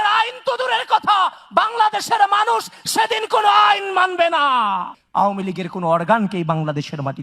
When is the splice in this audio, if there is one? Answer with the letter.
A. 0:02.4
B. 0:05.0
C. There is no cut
B